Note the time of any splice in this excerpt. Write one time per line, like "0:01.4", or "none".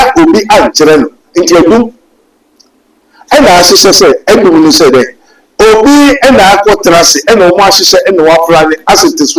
none